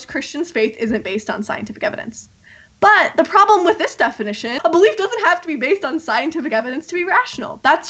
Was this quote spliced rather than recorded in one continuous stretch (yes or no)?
yes